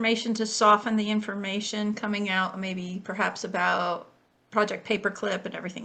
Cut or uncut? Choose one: uncut